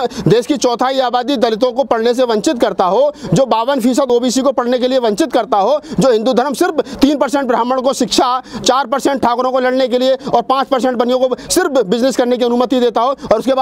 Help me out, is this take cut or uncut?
uncut